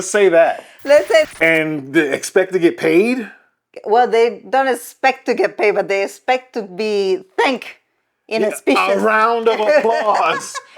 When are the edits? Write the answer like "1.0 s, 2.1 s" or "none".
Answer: 1.3 s